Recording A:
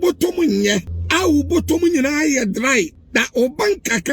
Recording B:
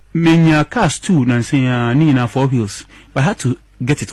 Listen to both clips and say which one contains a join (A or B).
A